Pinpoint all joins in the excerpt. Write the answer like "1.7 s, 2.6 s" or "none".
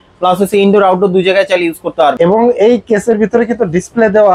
2.1 s